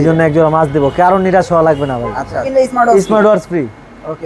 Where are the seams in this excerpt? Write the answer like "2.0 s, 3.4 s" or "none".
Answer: 2.4 s